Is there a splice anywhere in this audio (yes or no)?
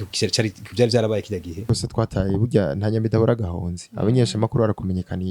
yes